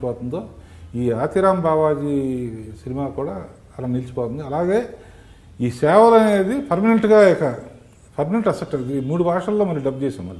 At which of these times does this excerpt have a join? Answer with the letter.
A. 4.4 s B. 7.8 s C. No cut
C